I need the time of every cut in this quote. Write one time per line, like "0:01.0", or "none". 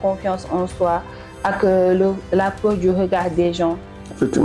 none